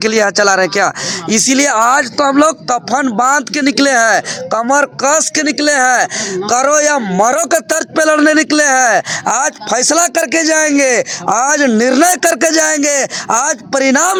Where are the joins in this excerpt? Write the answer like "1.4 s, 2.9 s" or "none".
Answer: none